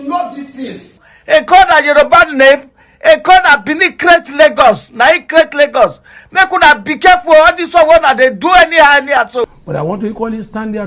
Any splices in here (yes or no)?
yes